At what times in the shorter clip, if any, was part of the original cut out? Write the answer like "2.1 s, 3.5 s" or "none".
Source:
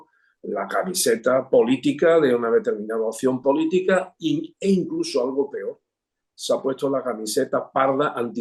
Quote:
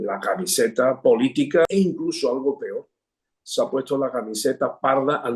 1.7 s